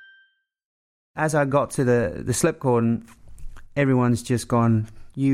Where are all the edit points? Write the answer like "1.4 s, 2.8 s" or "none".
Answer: 1.1 s